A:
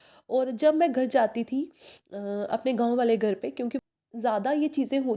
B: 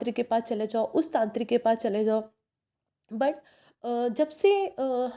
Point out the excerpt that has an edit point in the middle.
A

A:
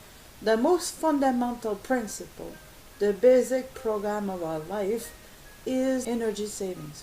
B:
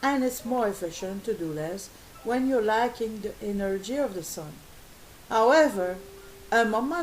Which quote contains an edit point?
A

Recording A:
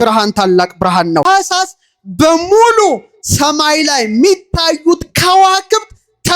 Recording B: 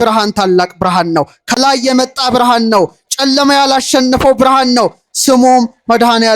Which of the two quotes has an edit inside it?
A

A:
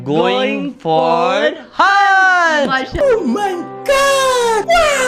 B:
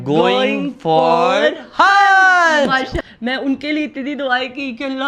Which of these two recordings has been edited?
B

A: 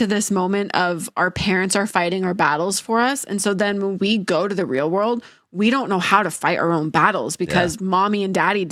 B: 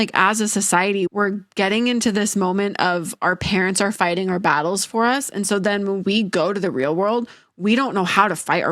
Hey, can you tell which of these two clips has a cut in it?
B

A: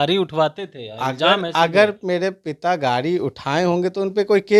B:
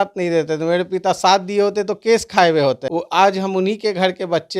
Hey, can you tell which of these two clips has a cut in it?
B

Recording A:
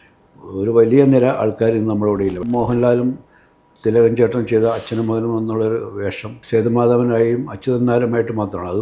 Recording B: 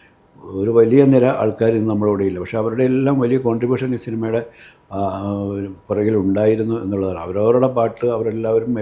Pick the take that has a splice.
A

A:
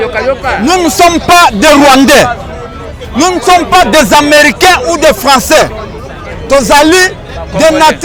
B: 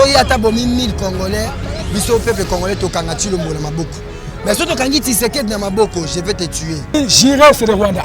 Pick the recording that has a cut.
B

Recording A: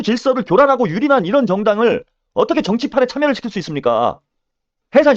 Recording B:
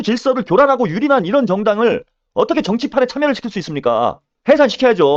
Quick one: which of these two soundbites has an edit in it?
B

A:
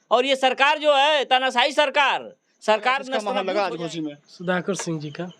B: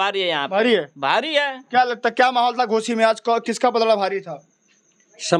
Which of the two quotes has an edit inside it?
A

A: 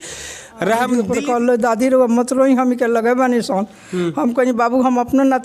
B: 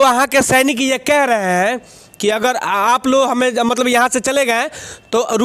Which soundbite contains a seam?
A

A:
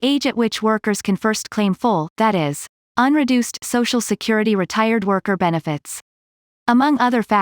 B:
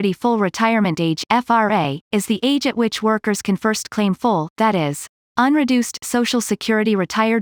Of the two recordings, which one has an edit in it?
A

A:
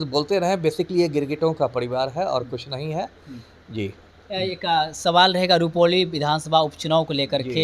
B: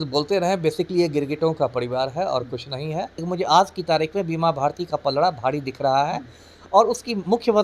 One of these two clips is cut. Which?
B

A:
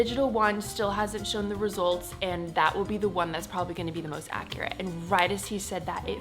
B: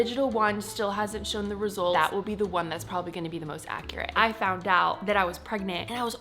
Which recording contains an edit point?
B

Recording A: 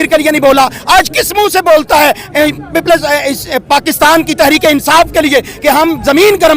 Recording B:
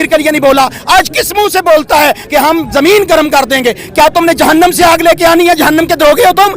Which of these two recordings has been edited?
B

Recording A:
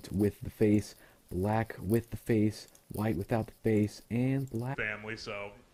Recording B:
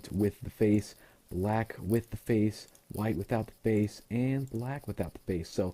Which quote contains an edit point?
B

